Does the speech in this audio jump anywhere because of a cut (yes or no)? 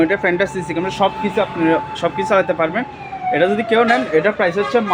no